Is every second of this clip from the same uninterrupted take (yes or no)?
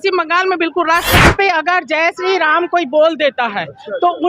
no